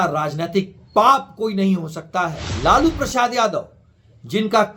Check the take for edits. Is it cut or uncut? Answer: cut